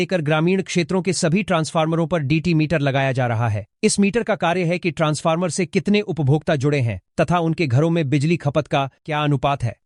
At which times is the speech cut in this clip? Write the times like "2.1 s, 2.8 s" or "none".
none